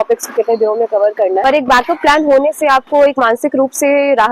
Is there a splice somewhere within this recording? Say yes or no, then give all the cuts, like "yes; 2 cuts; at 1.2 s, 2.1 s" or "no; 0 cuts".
yes; 1 cut; at 1.4 s